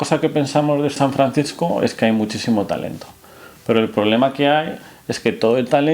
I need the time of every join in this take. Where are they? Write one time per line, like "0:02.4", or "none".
0:01.0